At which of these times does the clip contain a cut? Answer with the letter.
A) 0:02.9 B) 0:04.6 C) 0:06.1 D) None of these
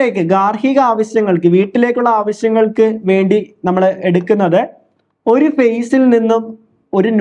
D